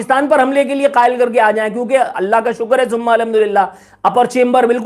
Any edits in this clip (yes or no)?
no